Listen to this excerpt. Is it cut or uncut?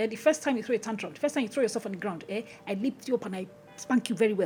uncut